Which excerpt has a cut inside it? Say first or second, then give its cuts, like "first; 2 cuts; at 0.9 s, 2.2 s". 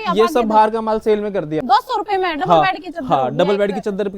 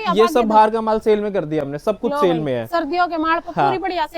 first; 1 cut; at 1.6 s